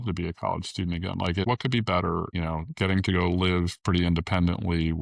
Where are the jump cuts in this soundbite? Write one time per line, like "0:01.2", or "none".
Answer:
0:01.4
0:02.3